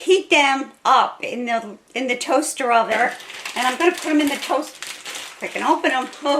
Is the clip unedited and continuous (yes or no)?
no